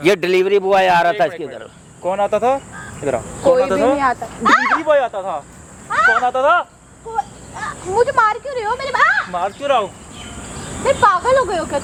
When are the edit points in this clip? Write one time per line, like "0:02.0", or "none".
none